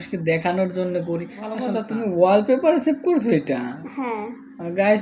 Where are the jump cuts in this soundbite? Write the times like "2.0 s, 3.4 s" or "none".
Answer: 1.8 s